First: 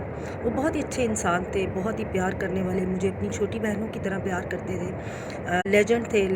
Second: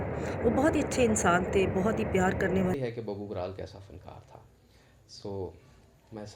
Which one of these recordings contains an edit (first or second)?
second